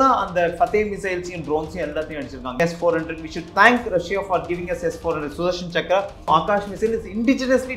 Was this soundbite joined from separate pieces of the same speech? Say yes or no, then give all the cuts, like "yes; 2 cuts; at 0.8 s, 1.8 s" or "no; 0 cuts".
yes; 2 cuts; at 2.5 s, 6.2 s